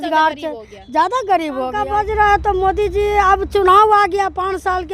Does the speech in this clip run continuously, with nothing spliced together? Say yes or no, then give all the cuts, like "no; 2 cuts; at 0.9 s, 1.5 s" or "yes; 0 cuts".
no; 1 cut; at 2.1 s